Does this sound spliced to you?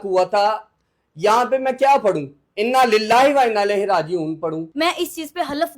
yes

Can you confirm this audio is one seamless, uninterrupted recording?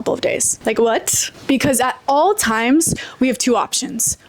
no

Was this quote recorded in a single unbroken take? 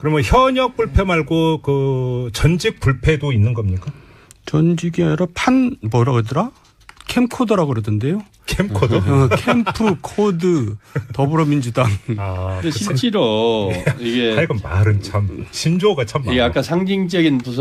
yes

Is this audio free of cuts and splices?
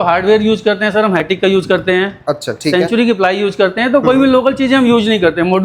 yes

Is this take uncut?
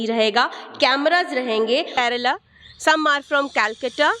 no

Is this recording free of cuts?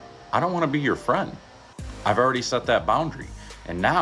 yes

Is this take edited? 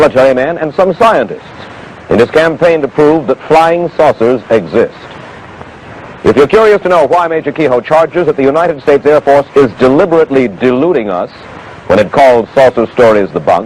no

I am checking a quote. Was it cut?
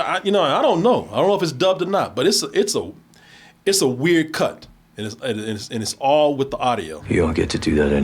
yes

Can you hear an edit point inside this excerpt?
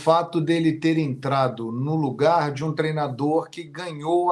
no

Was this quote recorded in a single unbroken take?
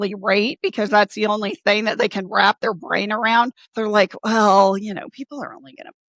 yes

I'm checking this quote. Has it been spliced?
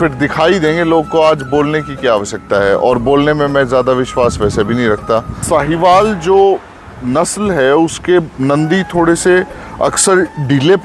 yes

